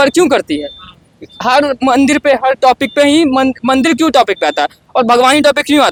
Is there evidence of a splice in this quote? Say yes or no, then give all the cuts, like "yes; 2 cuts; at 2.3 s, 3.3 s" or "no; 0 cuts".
no; 0 cuts